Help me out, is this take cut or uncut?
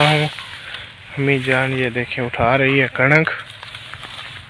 uncut